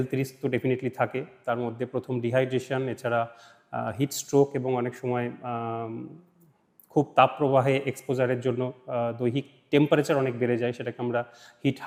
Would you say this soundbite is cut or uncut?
uncut